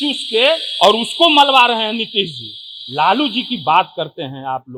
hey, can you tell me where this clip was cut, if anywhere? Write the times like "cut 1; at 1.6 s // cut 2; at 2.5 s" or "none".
none